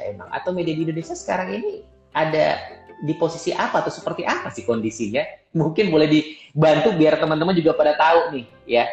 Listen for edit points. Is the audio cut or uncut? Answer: uncut